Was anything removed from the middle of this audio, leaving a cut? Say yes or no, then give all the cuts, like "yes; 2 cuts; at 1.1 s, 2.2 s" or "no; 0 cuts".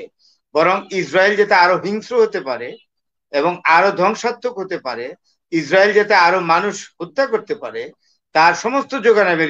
no; 0 cuts